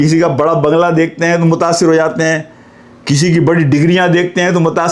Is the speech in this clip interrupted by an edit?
no; 0 cuts

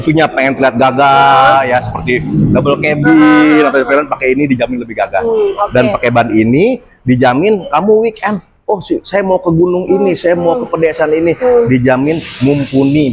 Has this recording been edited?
no; 0 cuts

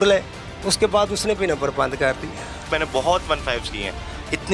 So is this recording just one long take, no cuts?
no; 1 cut; at 2.6 s

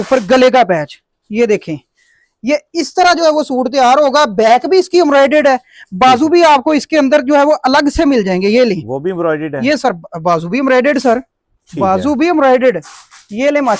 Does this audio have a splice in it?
no; 0 cuts

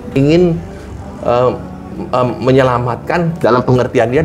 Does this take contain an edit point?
no; 0 cuts

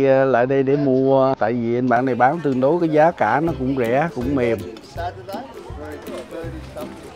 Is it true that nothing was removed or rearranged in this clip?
yes; 0 cuts

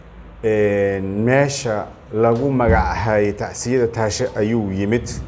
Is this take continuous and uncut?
yes; 0 cuts

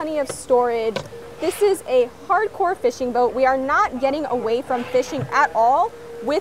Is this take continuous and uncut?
yes; 0 cuts

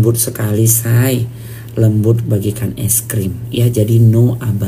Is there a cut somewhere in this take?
no; 0 cuts

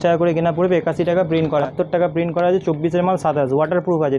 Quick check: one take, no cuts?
no; 1 cut; at 1.7 s

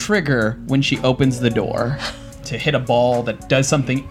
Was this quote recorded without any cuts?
no; 1 cut; at 2.5 s

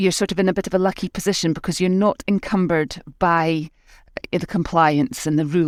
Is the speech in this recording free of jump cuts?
yes; 0 cuts

